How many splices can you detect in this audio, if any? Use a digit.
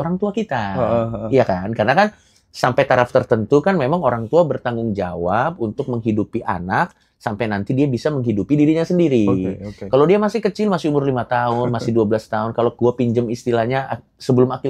0